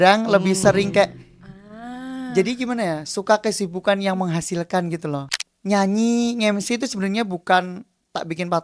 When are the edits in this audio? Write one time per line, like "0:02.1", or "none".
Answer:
0:05.2